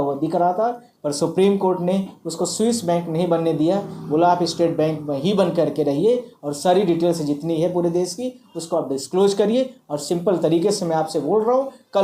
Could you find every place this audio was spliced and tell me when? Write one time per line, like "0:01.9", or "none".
none